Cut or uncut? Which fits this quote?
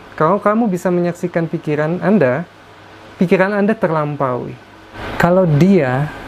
cut